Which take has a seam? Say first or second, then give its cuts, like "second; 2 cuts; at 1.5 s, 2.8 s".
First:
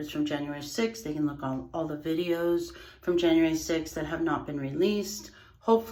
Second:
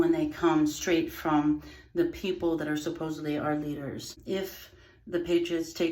second; 1 cut; at 4.2 s